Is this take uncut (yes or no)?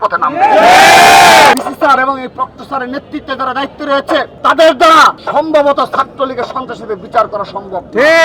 no